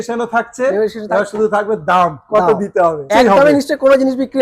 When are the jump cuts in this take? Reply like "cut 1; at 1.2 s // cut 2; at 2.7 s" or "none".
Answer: cut 1; at 3.1 s